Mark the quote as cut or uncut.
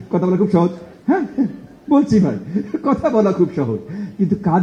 uncut